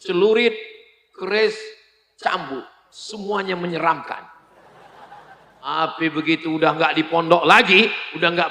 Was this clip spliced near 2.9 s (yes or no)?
no